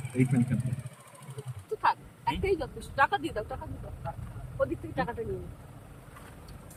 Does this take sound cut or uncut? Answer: uncut